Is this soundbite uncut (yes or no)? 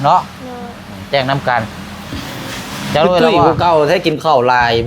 no